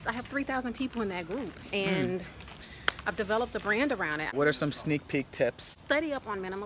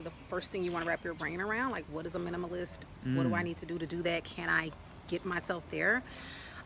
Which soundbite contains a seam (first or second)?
first